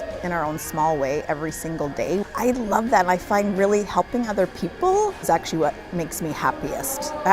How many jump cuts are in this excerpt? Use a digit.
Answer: 2